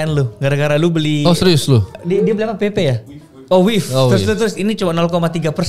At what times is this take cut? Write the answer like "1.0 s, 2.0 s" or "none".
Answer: 2.0 s